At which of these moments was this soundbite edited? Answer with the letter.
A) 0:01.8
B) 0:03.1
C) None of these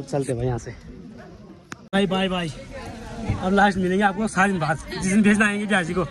A